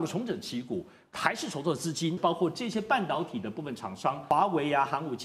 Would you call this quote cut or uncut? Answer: cut